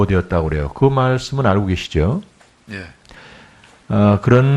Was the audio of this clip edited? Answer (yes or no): yes